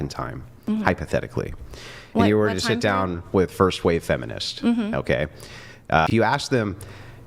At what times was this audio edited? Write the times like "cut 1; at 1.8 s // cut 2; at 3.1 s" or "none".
cut 1; at 6.1 s